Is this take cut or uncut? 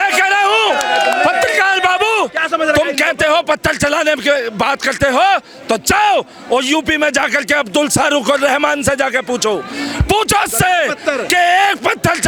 uncut